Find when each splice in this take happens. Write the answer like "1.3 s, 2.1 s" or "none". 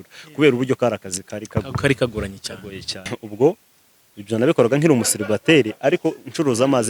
3.2 s